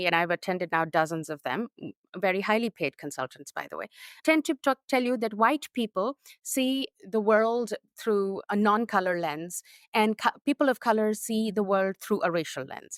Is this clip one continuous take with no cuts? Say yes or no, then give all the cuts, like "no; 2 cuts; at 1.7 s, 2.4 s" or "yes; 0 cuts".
yes; 0 cuts